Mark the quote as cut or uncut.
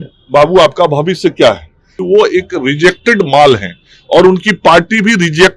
cut